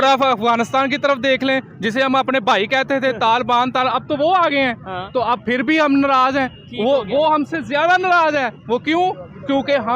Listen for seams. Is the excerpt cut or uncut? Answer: uncut